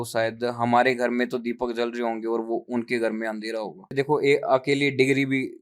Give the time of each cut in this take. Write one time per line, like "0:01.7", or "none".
0:03.9